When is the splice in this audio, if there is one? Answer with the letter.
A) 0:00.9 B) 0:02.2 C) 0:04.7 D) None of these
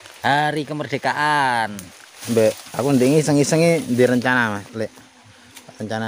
B